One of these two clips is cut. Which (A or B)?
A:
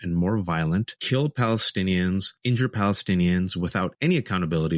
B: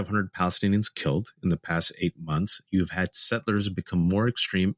A